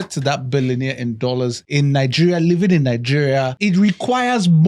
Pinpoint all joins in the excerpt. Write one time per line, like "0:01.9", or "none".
0:01.6
0:03.6